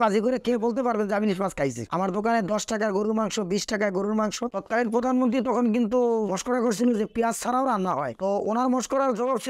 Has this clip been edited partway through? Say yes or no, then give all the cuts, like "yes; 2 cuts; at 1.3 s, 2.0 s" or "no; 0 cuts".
yes; 2 cuts; at 1.8 s, 4.5 s